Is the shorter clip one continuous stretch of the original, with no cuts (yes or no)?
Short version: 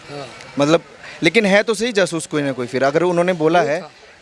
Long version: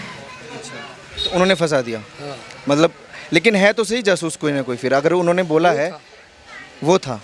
yes